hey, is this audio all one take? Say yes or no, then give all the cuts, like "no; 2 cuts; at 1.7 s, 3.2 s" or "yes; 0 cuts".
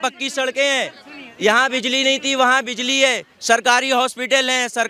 yes; 0 cuts